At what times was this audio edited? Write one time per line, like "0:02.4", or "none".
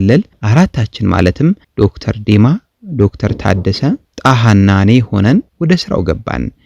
0:01.7
0:04.1
0:05.5